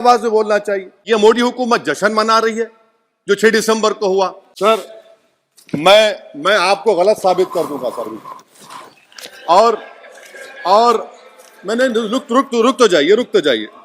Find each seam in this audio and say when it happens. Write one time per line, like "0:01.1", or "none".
0:01.0
0:04.4